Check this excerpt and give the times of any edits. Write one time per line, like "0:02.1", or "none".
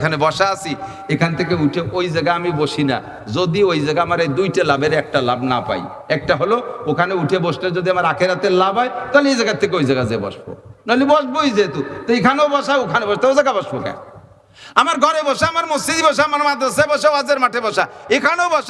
none